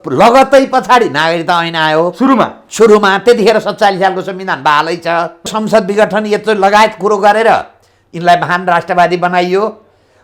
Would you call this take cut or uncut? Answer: cut